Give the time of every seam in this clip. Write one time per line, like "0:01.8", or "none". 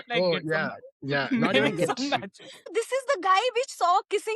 0:02.7